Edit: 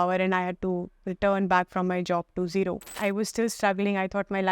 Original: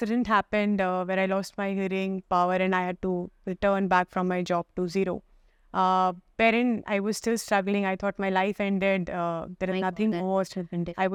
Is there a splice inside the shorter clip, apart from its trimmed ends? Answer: yes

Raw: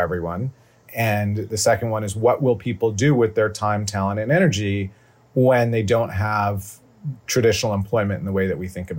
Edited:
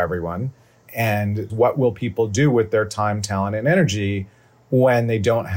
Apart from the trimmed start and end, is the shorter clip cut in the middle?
yes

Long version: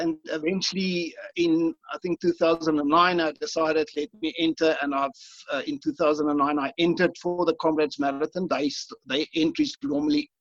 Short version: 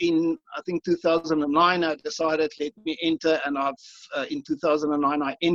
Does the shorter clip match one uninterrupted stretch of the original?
yes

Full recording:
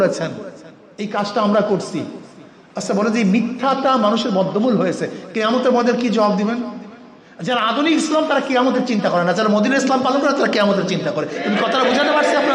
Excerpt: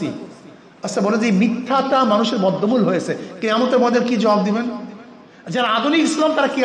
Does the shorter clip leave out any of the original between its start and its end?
no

